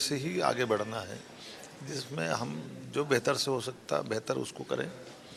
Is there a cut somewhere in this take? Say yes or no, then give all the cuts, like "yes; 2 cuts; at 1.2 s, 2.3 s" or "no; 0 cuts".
no; 0 cuts